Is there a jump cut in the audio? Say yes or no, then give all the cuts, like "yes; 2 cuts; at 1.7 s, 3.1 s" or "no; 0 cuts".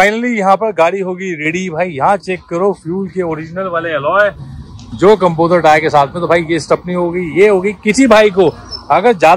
no; 0 cuts